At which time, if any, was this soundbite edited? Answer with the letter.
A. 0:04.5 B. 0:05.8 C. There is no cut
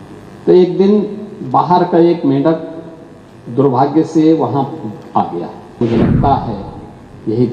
B